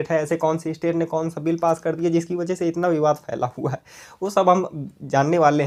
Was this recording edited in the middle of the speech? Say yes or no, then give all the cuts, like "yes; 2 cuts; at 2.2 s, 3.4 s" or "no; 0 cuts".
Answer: no; 0 cuts